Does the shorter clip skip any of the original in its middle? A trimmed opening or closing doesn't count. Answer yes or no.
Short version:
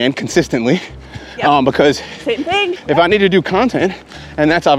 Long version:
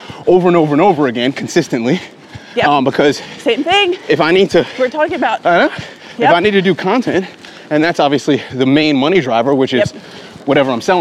yes